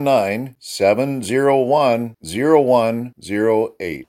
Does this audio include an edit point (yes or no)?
no